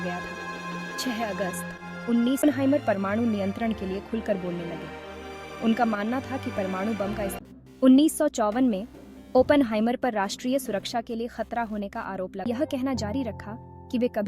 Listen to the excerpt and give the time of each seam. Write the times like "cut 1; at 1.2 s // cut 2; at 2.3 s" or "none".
cut 1; at 2.4 s // cut 2; at 7.4 s // cut 3; at 12.5 s